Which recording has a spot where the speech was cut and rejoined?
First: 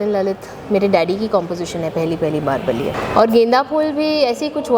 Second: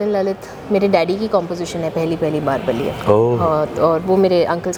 first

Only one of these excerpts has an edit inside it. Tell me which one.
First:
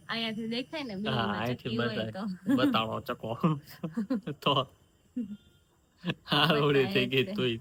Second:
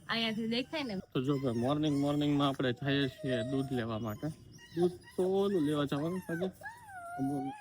second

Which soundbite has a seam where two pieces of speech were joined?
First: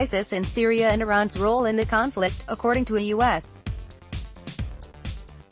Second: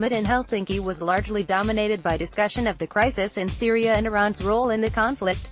first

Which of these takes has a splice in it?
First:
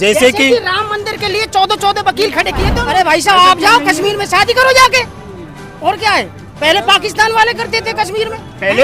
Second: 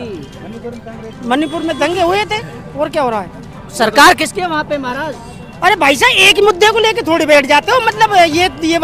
first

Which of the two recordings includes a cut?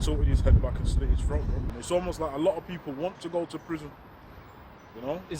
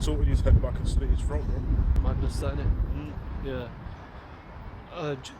first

